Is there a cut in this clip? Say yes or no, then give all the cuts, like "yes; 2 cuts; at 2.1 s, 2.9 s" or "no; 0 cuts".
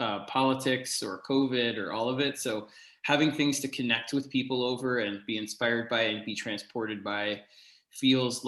no; 0 cuts